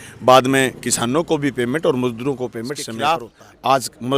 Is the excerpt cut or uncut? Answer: cut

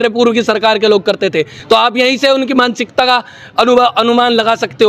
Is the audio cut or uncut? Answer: uncut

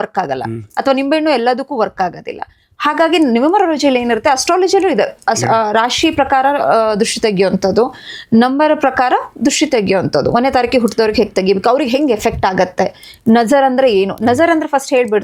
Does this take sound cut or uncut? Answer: uncut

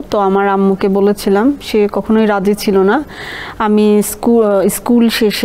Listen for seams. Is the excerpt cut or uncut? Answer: uncut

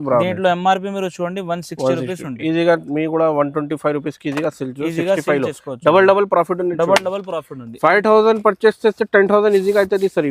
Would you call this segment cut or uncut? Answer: uncut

